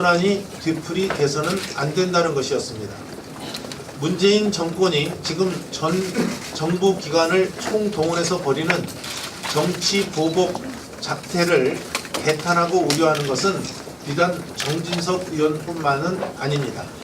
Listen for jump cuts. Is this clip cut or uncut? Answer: cut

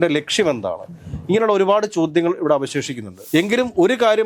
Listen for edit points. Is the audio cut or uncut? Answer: cut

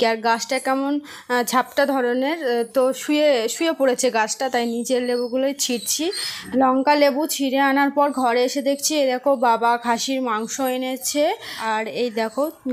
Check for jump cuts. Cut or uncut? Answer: cut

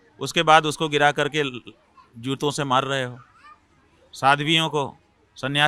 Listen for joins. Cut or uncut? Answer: uncut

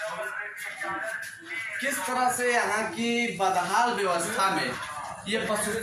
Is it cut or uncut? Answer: uncut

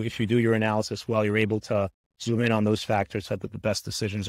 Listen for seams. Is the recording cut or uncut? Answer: uncut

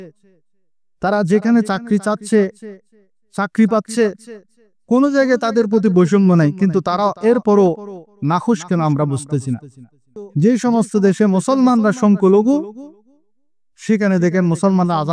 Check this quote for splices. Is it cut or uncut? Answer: cut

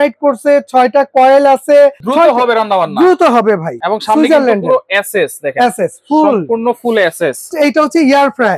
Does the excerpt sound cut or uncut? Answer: cut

